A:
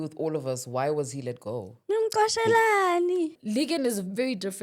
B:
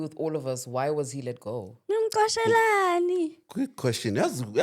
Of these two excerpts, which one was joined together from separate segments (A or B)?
A